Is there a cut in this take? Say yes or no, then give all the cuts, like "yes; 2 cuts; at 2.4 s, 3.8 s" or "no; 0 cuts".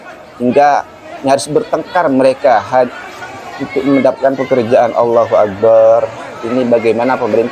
no; 0 cuts